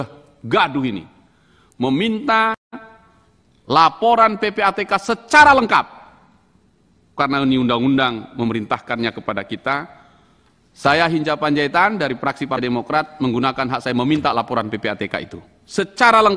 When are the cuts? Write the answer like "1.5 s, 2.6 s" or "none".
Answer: none